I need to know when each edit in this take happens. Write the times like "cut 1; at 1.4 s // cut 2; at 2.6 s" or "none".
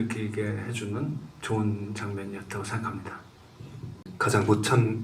cut 1; at 4.1 s